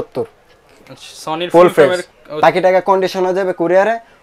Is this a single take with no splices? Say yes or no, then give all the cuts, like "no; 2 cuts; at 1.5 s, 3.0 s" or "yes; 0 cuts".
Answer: no; 1 cut; at 2.2 s